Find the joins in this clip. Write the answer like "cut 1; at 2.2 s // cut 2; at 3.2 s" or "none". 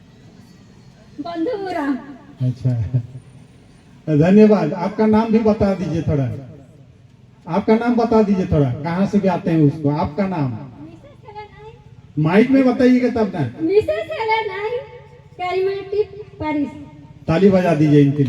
none